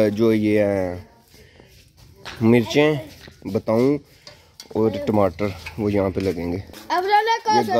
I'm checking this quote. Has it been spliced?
no; 0 cuts

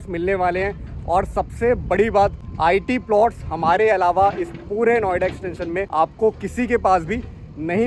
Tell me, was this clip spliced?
yes; 2 cuts; at 2.4 s, 5.9 s

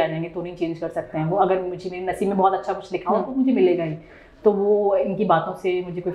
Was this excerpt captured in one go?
yes; 0 cuts

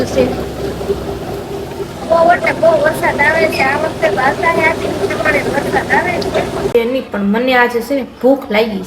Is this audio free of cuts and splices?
no; 1 cut; at 6.7 s

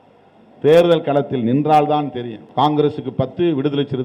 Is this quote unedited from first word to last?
no; 1 cut; at 2.4 s

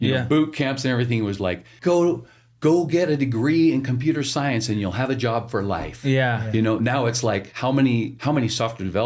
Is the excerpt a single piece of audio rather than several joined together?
no; 3 cuts; at 1.7 s, 7.5 s, 8.1 s

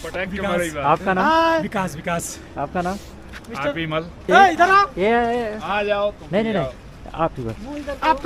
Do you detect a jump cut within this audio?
no; 0 cuts

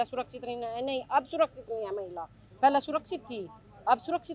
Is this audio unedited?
yes; 0 cuts

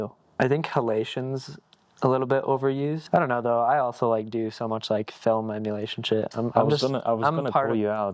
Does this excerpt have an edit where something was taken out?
yes; 1 cut; at 3.0 s

